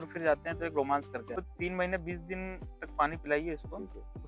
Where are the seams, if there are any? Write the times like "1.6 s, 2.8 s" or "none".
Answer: 1.3 s

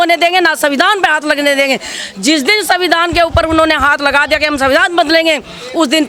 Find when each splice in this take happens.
none

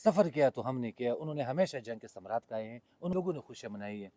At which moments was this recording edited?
3.1 s

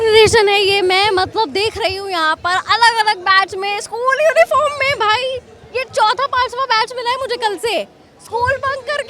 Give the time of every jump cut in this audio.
none

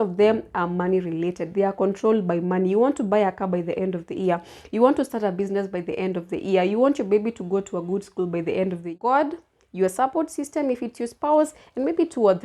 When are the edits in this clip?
8.8 s

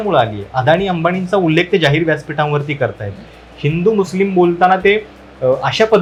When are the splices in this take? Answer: none

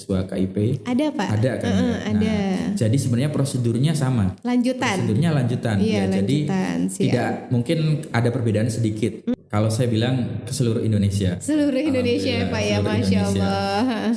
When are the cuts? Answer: 9.4 s

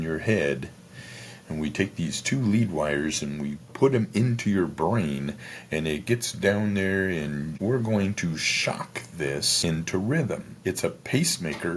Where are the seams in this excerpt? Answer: 3.6 s, 7.6 s, 9.5 s, 10.5 s

